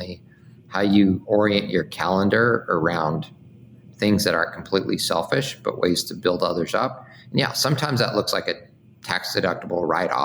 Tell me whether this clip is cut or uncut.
cut